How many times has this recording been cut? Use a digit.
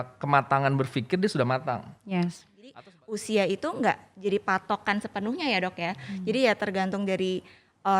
1